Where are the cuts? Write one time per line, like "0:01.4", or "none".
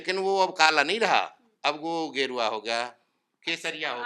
none